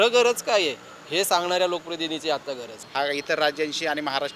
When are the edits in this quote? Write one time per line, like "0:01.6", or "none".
0:02.8